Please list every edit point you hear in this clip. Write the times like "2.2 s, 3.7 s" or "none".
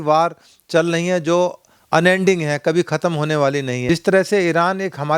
3.8 s